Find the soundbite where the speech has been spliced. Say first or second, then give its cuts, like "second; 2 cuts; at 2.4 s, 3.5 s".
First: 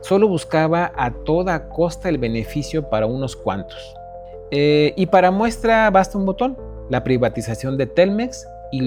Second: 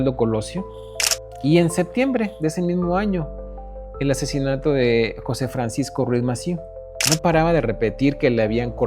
second; 1 cut; at 6.9 s